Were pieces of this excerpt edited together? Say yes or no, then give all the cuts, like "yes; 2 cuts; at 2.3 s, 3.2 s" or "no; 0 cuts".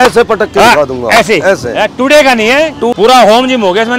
yes; 1 cut; at 2.9 s